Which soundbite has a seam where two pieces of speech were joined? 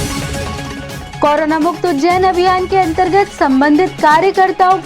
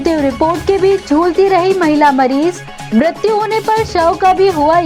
first; 1 cut; at 1.1 s

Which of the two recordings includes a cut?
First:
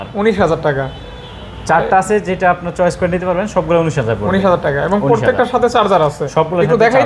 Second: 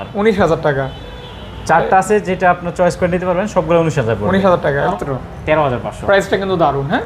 second; 1 cut; at 4.9 s

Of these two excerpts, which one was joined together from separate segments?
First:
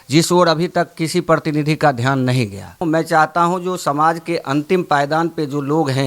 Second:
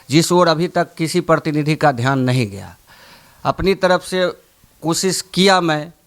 first; 1 cut; at 2.8 s

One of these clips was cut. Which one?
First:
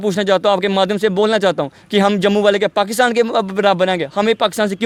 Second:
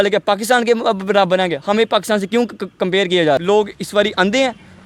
second; 1 cut; at 3.4 s

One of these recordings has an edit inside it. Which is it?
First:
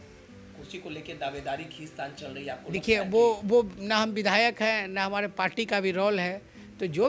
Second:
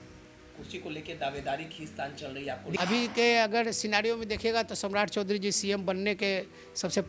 second; 1 cut; at 2.8 s

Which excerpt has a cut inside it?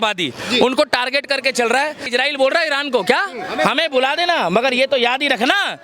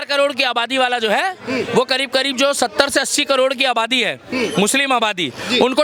first; 1 cut; at 2.0 s

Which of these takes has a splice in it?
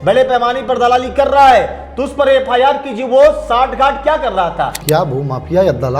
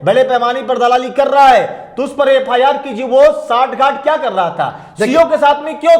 first; 1 cut; at 4.8 s

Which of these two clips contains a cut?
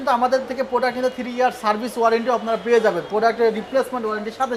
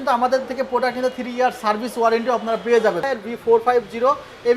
second; 1 cut; at 3.0 s

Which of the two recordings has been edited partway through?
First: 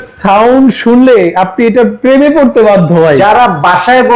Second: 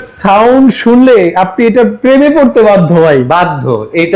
first; 1 cut; at 3.2 s

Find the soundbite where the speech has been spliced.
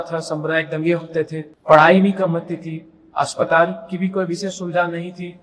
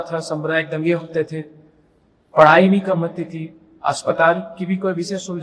first; 1 cut; at 1.5 s

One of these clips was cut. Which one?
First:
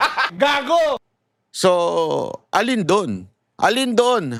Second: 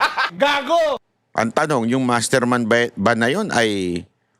second; 1 cut; at 1.1 s

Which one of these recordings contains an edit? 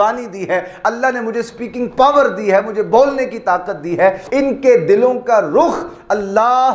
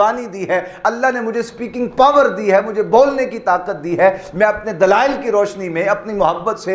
first; 1 cut; at 4.2 s

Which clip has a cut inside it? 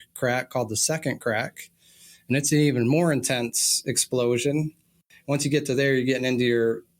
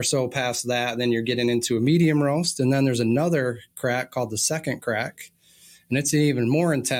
first; 1 cut; at 5.1 s

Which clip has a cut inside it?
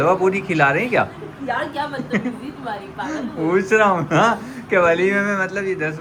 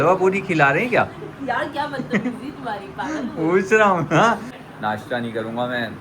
second; 1 cut; at 4.5 s

